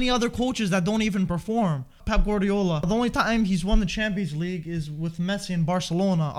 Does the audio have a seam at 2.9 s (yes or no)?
yes